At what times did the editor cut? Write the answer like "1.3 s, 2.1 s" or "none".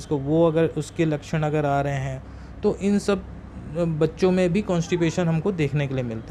none